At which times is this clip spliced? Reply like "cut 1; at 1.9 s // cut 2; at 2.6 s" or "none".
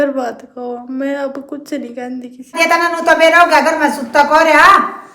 cut 1; at 2.6 s